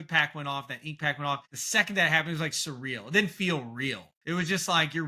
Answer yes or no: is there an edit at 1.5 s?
yes